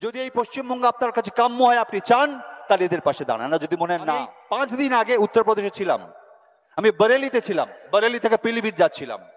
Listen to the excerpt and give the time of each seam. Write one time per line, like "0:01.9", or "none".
0:04.3